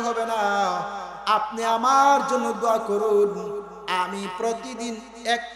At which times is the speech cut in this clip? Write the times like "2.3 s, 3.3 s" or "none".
none

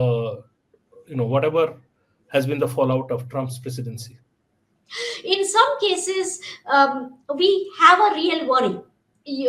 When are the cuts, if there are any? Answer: 4.8 s

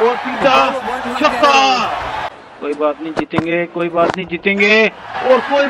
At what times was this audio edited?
2.2 s

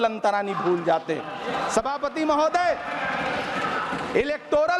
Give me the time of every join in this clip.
none

